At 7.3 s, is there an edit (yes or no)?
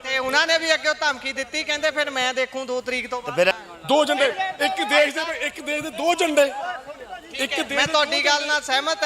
no